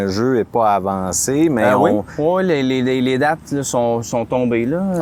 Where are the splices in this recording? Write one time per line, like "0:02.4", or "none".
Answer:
none